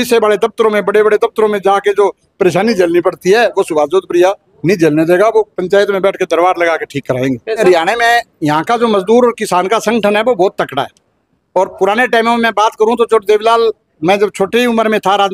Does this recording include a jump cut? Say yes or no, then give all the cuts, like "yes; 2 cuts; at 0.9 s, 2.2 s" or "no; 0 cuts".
yes; 1 cut; at 7.6 s